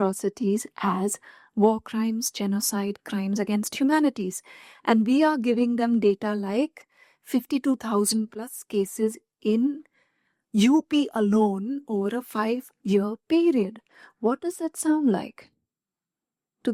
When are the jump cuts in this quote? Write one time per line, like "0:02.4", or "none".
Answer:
none